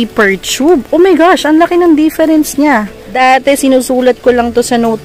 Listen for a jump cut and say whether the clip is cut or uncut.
cut